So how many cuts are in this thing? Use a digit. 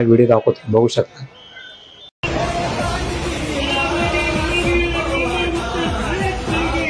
0